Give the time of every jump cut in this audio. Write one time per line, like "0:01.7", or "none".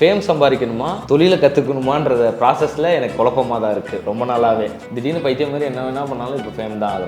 0:00.9
0:04.8